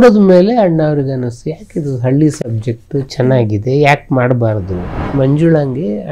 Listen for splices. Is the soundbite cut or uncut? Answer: cut